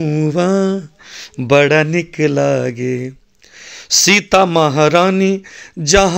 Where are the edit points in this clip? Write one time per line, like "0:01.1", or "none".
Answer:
none